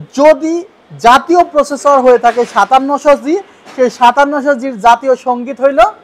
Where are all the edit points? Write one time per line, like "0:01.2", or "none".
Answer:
none